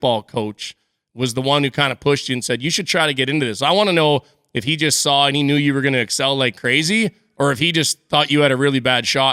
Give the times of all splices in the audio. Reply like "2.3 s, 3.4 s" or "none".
none

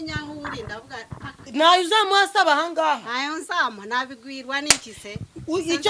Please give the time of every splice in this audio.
1.5 s

